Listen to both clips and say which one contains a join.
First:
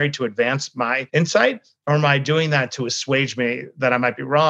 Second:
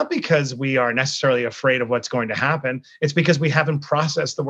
first; 1 cut; at 1.0 s

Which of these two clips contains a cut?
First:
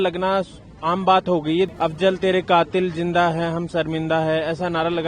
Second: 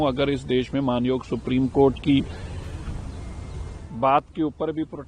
first; 1 cut; at 1.7 s

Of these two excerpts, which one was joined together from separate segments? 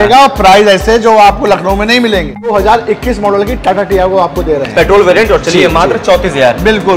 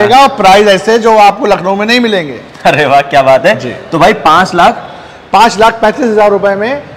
first; 1 cut; at 2.5 s

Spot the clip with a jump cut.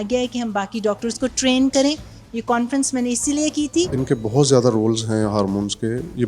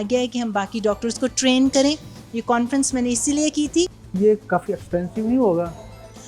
first; 1 cut; at 4.0 s

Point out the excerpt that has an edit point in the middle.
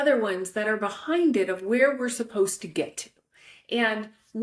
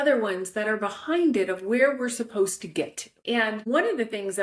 second; 1 cut; at 3.5 s

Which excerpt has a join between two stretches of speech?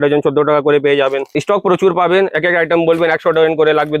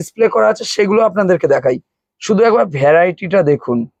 first; 1 cut; at 1.3 s

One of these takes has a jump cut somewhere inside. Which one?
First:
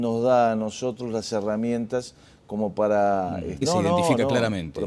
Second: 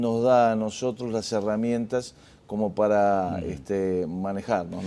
second; 1 cut; at 3.6 s

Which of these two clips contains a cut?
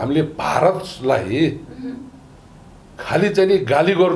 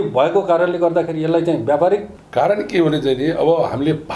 second; 1 cut; at 2.2 s

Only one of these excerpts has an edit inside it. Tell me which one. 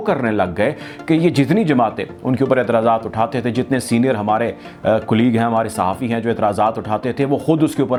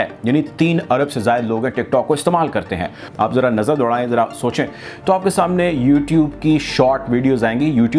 second; 1 cut; at 3.1 s

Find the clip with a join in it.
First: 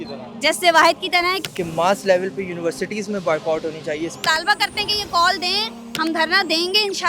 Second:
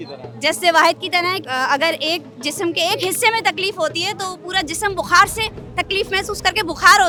first; 2 cuts; at 1.4 s, 4.2 s

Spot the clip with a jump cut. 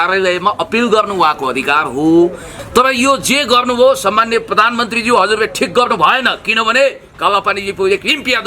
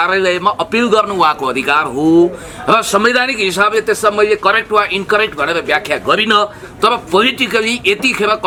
first; 1 cut; at 2.5 s

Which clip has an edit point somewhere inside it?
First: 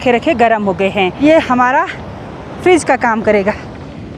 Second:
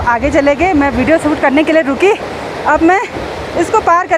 first; 1 cut; at 1.1 s

